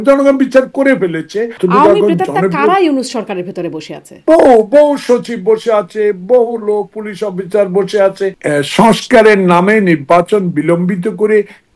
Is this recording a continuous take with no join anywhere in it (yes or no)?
no